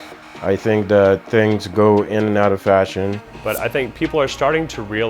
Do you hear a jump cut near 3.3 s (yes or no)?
yes